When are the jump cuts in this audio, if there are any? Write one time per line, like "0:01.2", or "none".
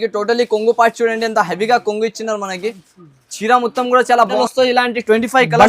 0:04.4

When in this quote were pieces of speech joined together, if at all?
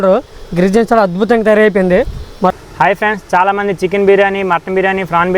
0:02.6

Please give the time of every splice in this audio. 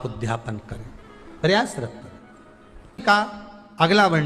0:03.0

